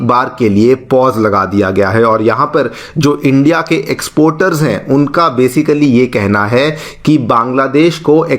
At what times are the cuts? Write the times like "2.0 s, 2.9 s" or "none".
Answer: none